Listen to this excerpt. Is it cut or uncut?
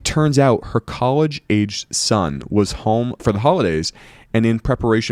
uncut